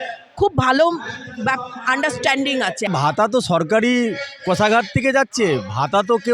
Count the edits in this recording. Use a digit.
1